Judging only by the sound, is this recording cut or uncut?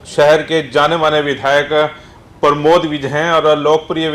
uncut